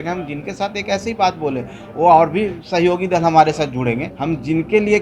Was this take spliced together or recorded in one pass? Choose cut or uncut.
cut